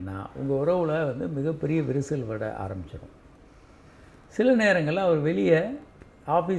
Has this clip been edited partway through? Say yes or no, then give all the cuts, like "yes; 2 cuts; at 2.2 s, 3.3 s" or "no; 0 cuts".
no; 0 cuts